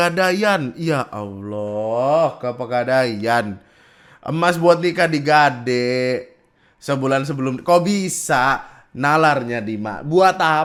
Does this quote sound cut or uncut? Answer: uncut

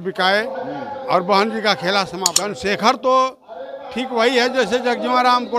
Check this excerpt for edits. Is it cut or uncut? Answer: cut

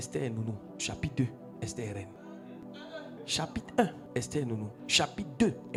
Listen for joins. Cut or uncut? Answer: uncut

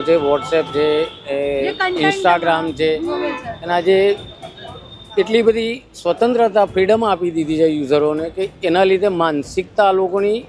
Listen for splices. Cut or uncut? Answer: uncut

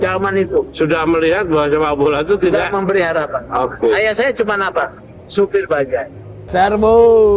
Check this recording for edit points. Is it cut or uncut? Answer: cut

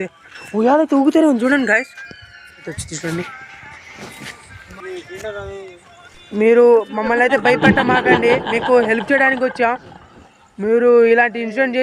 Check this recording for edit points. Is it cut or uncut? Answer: cut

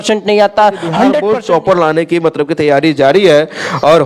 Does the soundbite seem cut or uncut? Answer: cut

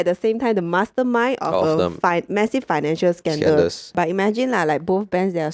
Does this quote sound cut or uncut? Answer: cut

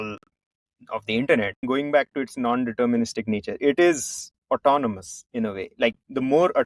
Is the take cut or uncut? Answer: cut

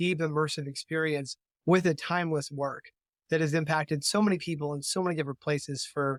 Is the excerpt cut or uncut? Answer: uncut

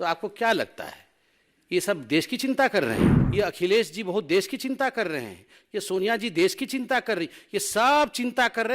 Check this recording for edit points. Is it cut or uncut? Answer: cut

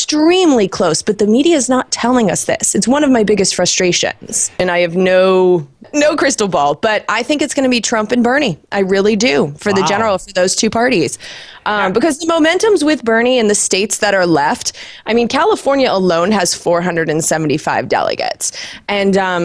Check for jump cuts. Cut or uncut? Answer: cut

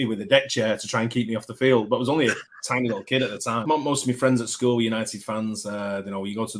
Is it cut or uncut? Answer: cut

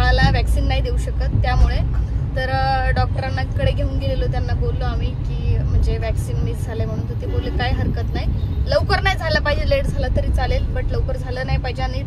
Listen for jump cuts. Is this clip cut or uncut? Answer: uncut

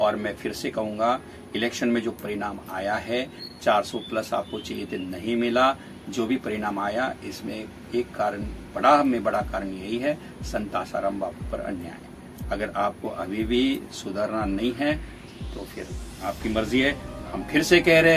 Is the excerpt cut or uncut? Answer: uncut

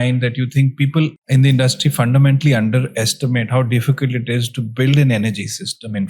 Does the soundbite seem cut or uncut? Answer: cut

